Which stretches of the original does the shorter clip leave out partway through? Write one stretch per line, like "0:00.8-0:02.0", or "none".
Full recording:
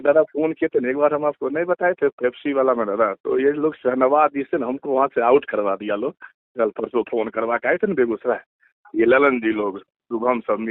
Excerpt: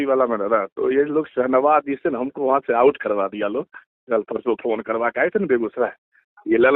none